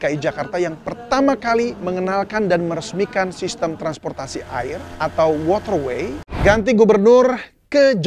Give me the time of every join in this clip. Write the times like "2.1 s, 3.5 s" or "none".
4.9 s, 6.4 s

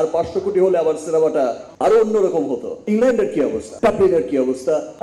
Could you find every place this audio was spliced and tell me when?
2.8 s, 3.7 s

